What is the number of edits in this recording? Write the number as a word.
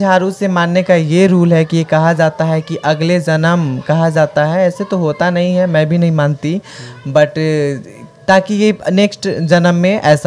zero